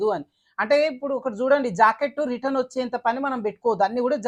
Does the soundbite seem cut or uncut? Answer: uncut